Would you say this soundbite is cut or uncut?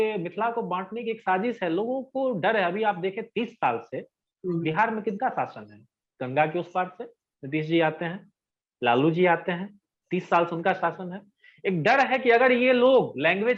uncut